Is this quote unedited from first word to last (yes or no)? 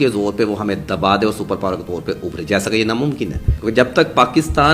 no